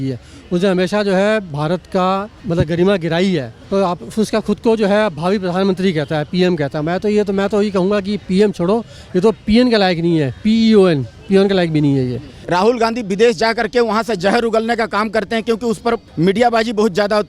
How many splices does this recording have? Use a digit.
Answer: 4